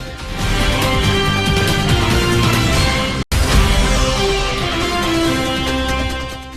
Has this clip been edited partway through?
no; 0 cuts

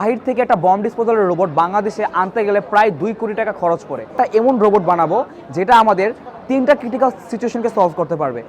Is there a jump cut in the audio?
yes; 1 cut; at 4.1 s

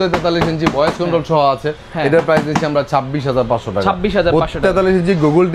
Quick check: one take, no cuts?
yes; 0 cuts

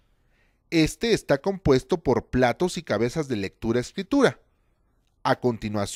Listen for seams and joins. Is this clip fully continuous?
yes; 0 cuts

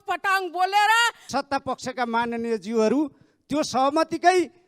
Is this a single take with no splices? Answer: no; 1 cut; at 1.3 s

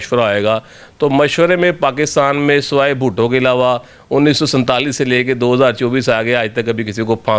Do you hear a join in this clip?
no; 0 cuts

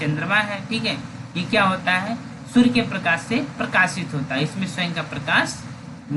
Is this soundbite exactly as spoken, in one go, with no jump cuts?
yes; 0 cuts

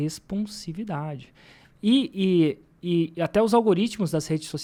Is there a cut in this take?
no; 0 cuts

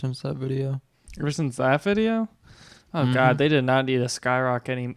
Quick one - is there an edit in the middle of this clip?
no; 0 cuts

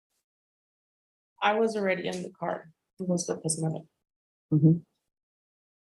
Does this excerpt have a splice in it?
yes; 1 cut; at 3.2 s

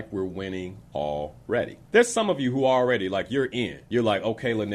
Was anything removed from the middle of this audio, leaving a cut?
yes; 2 cuts; at 1.8 s, 3.8 s

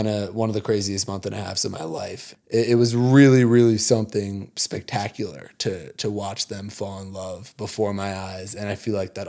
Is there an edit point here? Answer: yes; 1 cut; at 2.2 s

